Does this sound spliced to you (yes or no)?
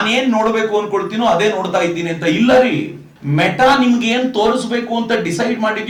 no